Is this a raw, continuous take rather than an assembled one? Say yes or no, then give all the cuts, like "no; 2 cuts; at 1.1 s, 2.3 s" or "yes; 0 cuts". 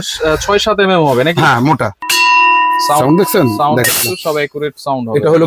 no; 1 cut; at 2.0 s